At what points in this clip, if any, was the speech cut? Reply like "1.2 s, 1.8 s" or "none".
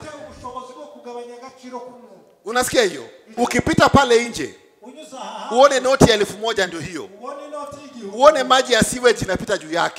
3.3 s